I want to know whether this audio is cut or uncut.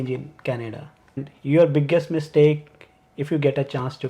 cut